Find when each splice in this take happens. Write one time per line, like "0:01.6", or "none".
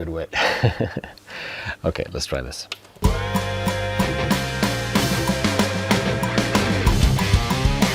0:03.0